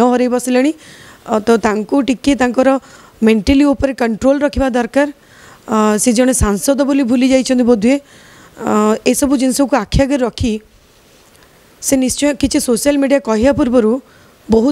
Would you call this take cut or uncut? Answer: uncut